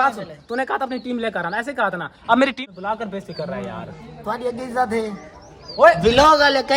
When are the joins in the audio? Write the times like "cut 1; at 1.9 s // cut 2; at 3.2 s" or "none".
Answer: cut 1; at 2.5 s

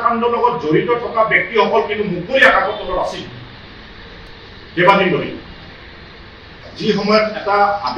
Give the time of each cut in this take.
cut 1; at 4.3 s // cut 2; at 6.7 s

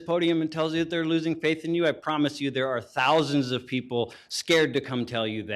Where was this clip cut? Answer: none

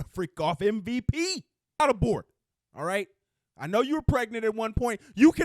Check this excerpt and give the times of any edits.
cut 1; at 1.8 s

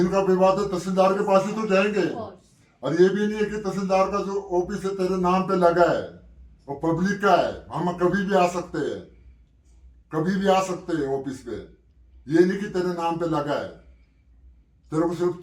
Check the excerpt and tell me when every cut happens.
none

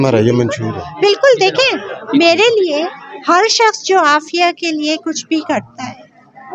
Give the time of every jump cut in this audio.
none

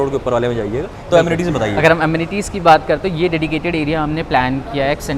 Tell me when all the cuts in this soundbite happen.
none

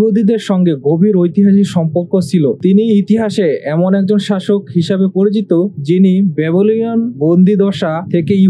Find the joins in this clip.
cut 1; at 2.6 s

